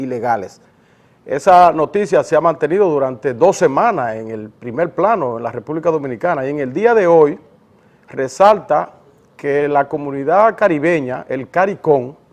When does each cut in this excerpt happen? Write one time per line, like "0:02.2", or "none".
0:06.7